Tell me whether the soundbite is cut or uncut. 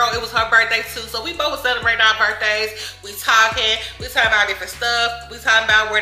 uncut